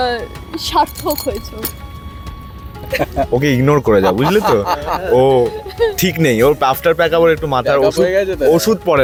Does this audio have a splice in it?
no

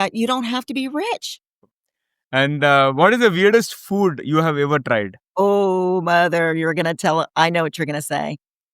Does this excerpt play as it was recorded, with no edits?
no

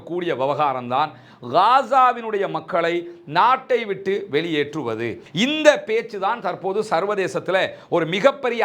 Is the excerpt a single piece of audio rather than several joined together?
no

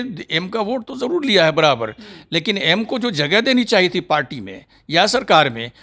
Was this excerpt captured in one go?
yes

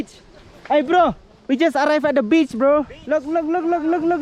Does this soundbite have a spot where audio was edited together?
no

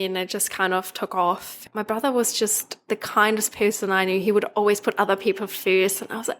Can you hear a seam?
yes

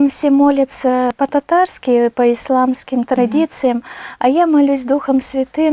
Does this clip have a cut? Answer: yes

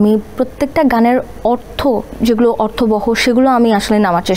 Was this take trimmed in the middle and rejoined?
yes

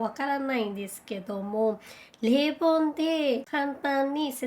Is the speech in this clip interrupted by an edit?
yes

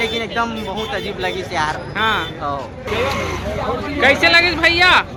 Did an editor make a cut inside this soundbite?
no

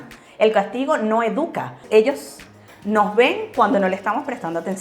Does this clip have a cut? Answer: yes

